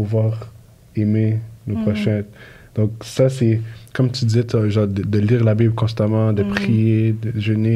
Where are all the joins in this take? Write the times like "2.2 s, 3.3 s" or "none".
none